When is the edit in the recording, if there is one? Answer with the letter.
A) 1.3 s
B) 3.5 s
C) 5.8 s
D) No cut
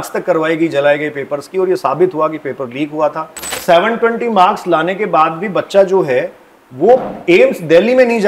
B